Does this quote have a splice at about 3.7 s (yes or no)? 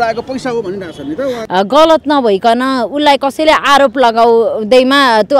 no